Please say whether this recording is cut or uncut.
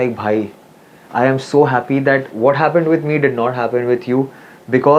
uncut